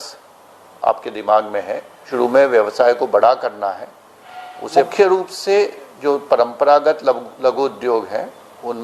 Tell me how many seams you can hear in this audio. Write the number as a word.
two